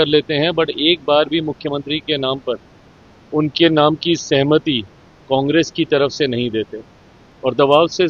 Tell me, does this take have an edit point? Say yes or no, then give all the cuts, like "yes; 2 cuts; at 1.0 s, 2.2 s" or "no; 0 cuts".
no; 0 cuts